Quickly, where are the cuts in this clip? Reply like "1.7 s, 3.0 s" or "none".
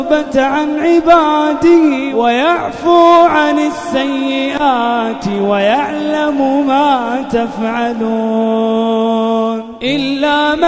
2.1 s